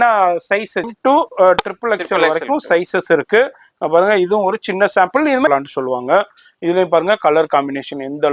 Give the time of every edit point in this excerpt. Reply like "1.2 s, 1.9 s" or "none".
0.9 s, 5.5 s